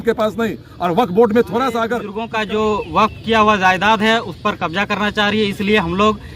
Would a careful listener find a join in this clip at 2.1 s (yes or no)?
yes